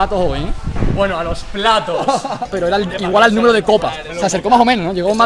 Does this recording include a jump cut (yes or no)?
yes